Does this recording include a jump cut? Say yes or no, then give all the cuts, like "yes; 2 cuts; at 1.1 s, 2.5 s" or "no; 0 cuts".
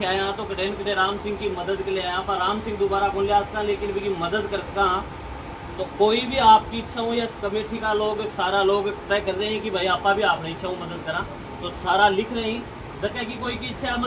no; 0 cuts